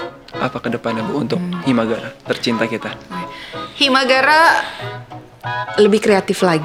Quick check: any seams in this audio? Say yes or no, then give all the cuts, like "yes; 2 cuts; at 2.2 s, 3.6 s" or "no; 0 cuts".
no; 0 cuts